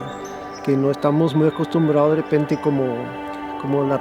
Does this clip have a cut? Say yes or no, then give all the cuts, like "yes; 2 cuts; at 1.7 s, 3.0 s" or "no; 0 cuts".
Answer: no; 0 cuts